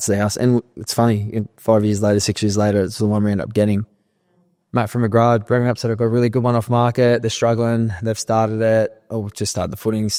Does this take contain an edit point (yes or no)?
no